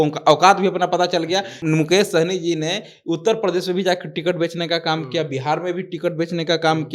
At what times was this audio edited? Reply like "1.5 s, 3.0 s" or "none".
1.6 s